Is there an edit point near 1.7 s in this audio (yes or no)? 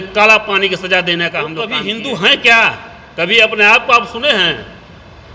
yes